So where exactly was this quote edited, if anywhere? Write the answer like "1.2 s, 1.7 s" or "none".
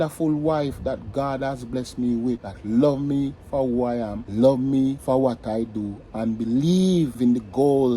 2.5 s, 4.2 s, 5.0 s, 7.1 s